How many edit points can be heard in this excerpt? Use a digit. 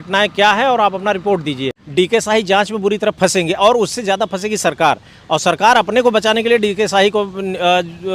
1